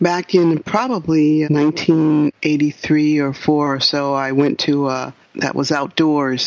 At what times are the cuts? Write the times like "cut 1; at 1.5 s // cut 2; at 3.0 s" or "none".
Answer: cut 1; at 1.5 s // cut 2; at 5.1 s